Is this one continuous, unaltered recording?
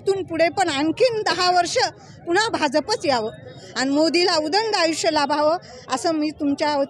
no; 1 cut; at 3.6 s

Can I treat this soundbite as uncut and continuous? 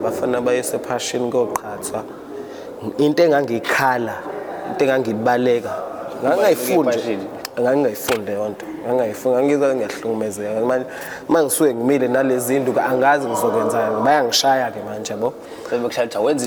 yes; 0 cuts

